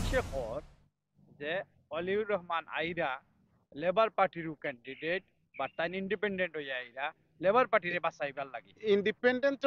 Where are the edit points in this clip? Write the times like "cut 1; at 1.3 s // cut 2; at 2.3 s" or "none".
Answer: none